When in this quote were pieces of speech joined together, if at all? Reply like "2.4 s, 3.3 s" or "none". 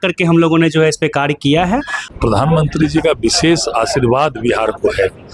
2.1 s